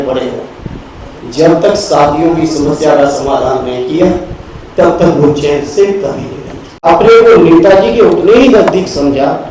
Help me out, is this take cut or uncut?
cut